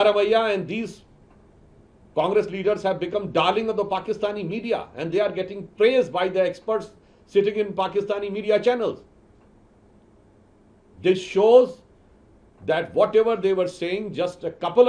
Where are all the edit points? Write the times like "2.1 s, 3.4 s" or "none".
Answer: none